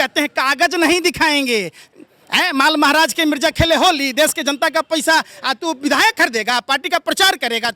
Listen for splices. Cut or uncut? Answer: uncut